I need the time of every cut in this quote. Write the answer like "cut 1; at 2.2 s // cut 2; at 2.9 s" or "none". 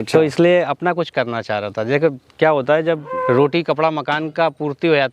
cut 1; at 3.1 s